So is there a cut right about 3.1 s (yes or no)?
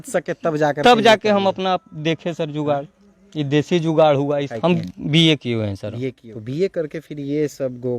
no